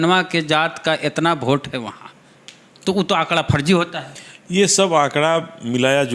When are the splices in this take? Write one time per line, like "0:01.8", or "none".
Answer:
none